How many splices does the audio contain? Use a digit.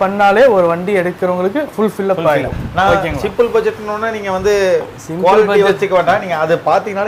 0